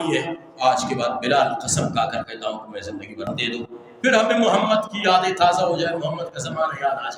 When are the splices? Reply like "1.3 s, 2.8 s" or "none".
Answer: 3.3 s